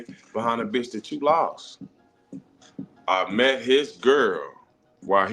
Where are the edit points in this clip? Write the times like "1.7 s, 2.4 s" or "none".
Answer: 2.6 s